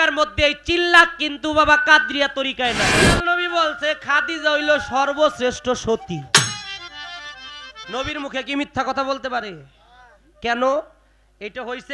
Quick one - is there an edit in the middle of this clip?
yes; 1 cut; at 3.1 s

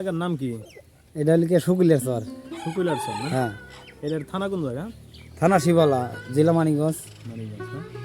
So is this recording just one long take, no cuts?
yes; 0 cuts

